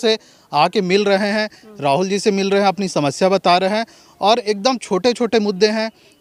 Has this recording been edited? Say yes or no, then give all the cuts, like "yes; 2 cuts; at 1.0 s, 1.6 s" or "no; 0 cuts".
no; 0 cuts